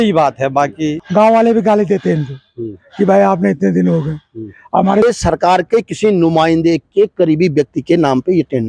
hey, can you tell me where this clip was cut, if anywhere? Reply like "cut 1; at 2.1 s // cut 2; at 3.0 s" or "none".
cut 1; at 1.0 s // cut 2; at 5.0 s